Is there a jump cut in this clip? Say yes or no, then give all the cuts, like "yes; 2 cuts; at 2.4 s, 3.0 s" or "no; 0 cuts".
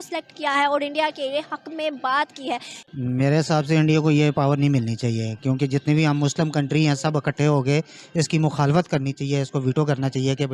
no; 0 cuts